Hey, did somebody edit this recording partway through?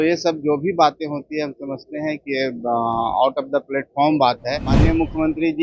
yes; 1 cut; at 4.7 s

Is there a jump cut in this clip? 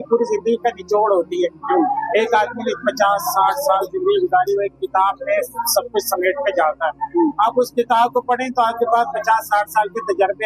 no; 0 cuts

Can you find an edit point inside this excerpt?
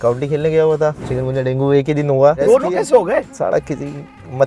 yes; 3 cuts; at 1.1 s, 2.4 s, 3.3 s

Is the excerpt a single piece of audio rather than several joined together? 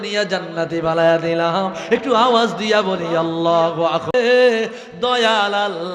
no; 1 cut; at 4.1 s

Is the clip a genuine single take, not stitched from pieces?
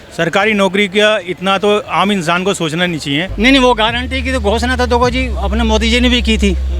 no; 1 cut; at 3.3 s

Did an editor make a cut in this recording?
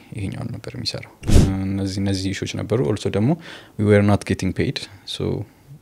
yes; 1 cut; at 1.3 s

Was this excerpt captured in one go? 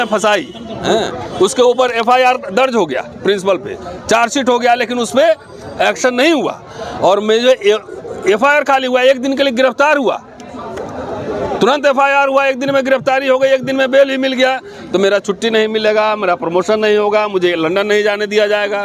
yes; 0 cuts

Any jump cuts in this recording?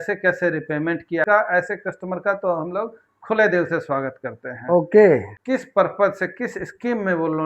yes; 2 cuts; at 1.2 s, 5.3 s

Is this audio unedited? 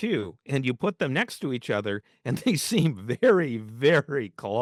yes; 0 cuts

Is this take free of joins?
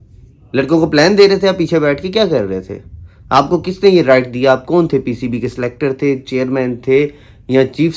yes; 0 cuts

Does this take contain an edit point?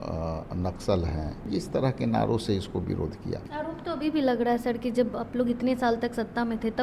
yes; 2 cuts; at 1.5 s, 3.4 s

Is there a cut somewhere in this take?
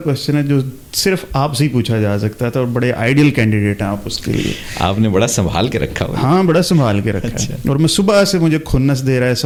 no; 0 cuts

